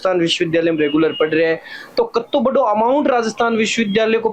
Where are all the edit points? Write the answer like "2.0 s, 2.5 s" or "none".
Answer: none